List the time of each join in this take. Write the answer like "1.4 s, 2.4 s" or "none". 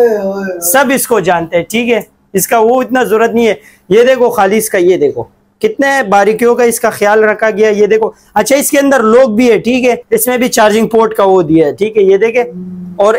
10.0 s